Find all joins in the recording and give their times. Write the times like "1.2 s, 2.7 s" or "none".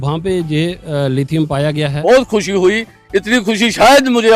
2.0 s